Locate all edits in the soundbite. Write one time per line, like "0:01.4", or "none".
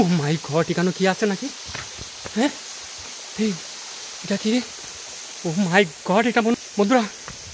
none